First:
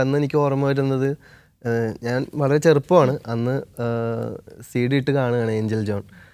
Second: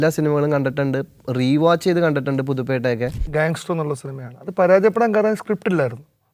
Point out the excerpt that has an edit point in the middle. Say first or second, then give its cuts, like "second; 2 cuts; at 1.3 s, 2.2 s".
second; 1 cut; at 3.2 s